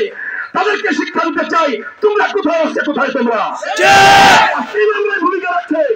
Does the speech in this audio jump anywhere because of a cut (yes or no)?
no